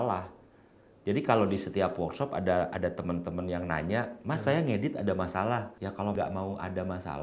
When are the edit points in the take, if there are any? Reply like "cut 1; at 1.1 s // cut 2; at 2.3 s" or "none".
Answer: cut 1; at 6.1 s